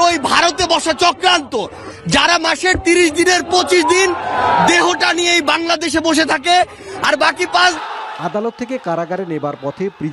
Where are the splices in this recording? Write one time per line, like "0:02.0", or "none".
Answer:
0:07.8